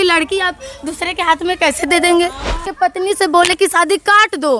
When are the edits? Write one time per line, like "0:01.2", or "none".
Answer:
0:02.7